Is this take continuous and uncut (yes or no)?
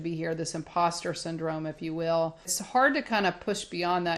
no